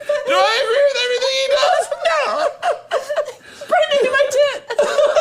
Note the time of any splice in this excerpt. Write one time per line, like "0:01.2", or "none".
0:02.3